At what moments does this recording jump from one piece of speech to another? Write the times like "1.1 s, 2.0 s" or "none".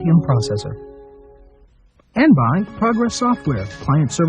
2.1 s